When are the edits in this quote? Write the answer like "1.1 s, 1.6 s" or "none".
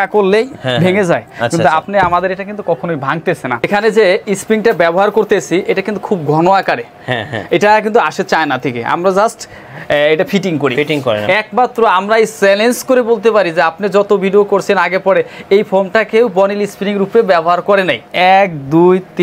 3.6 s, 11.3 s, 18.1 s